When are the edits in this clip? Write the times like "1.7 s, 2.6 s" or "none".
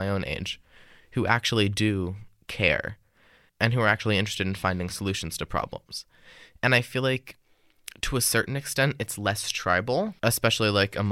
3.5 s, 10.1 s